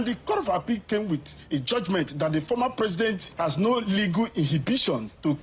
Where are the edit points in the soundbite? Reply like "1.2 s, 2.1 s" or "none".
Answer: none